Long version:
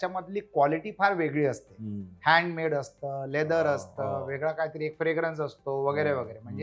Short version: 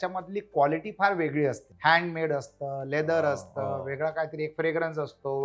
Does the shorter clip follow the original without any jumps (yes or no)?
no